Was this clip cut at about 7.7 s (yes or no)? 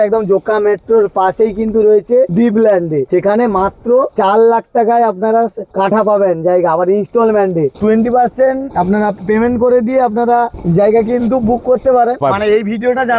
yes